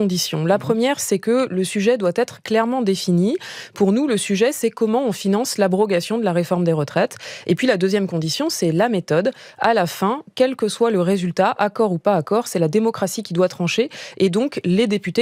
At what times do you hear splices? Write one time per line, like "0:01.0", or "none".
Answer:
none